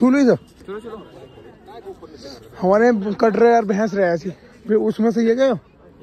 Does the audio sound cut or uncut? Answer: uncut